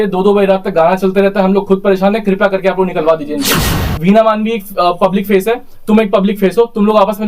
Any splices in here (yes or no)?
yes